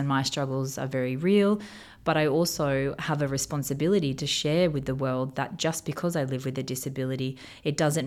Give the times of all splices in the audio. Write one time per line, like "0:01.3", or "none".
none